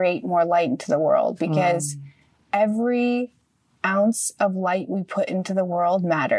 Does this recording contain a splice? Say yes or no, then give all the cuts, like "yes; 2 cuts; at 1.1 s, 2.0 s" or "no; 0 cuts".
no; 0 cuts